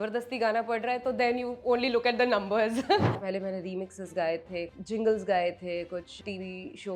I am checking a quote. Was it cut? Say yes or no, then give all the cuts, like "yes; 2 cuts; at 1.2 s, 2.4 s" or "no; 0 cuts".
yes; 3 cuts; at 3.2 s, 4.7 s, 6.2 s